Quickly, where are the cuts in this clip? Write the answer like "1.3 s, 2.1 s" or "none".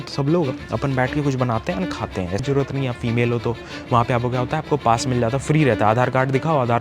2.4 s